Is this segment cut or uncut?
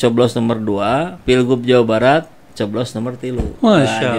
cut